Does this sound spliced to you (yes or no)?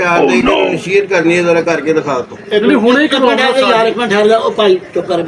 no